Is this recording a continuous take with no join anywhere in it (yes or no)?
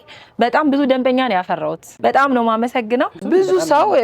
no